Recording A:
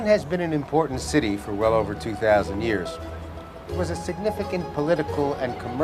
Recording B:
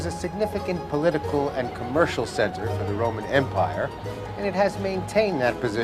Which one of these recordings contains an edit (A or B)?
B